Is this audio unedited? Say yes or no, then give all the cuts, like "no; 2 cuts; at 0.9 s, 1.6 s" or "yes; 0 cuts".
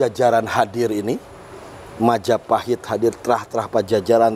yes; 0 cuts